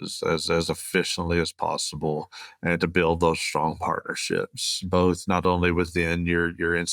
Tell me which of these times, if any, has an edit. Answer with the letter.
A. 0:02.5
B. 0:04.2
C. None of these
C